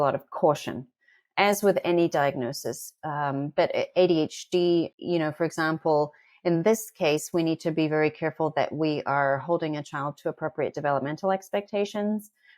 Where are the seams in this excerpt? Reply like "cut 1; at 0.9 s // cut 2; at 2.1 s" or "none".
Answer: cut 1; at 4.9 s